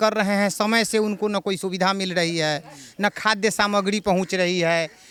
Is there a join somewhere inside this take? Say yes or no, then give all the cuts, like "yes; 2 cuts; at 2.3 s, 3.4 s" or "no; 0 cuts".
no; 0 cuts